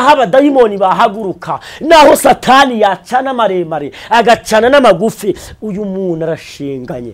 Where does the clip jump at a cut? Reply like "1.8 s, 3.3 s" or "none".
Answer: none